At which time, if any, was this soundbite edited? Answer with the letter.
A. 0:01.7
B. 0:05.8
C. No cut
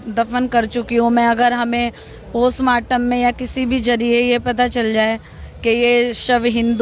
C